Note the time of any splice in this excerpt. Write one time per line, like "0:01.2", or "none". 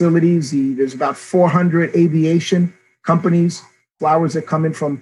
0:03.9